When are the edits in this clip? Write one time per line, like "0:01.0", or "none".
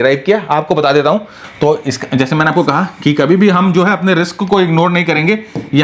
0:01.4